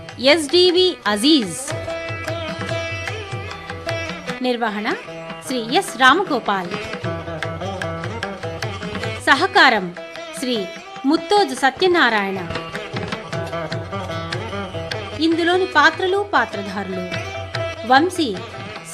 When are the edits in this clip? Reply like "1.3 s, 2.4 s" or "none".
1.6 s, 4.2 s, 7.3 s, 9.2 s, 12.5 s, 15.1 s